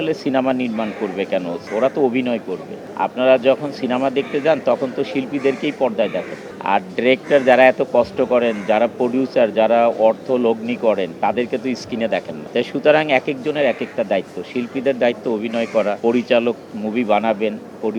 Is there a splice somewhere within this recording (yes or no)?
no